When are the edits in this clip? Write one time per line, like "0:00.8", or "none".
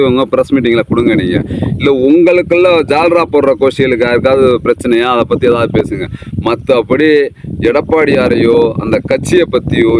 none